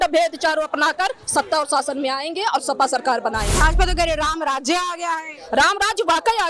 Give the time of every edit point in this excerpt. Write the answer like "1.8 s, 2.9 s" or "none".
3.5 s

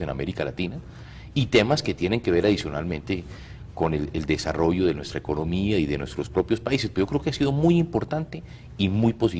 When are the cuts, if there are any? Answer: 8.0 s

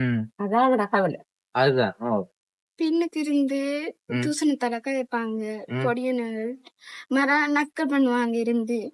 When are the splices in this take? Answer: 2.6 s

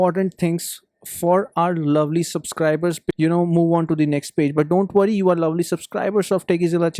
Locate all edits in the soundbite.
3.1 s

